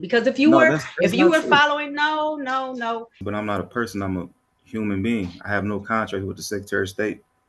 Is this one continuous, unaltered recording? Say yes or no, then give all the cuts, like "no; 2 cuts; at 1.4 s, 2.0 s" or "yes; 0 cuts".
no; 1 cut; at 3.2 s